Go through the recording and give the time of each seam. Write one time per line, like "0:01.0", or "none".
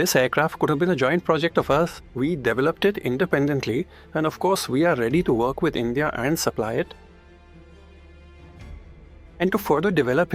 0:02.0